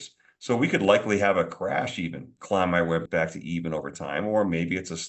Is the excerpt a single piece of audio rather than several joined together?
no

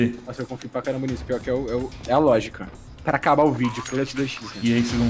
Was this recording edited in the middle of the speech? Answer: yes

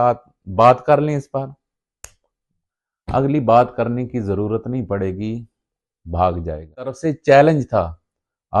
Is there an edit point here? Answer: yes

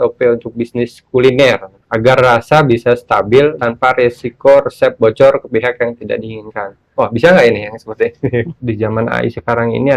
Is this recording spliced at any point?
yes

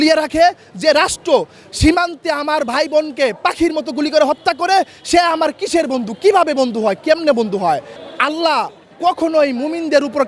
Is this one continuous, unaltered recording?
no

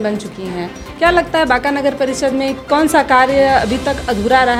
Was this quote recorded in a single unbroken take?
yes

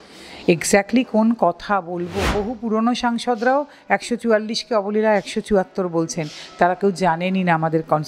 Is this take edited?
yes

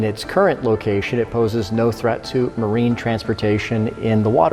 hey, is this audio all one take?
yes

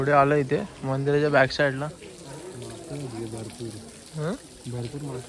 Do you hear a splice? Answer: no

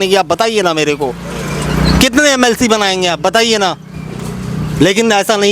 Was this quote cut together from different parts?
no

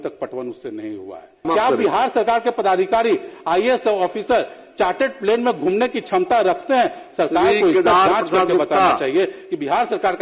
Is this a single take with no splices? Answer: no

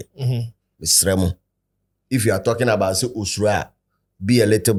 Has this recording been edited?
no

